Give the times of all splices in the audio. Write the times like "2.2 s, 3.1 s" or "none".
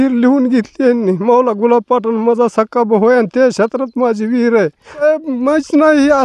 5.0 s

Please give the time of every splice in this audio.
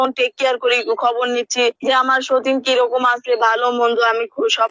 1.8 s

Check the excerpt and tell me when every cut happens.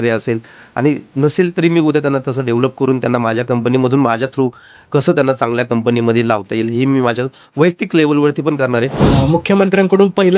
9.0 s

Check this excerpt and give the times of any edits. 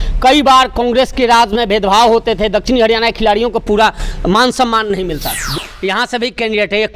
5.4 s

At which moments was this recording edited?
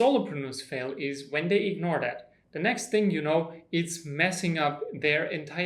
none

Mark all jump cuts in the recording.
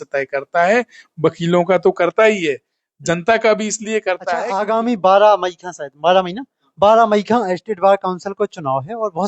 4.6 s

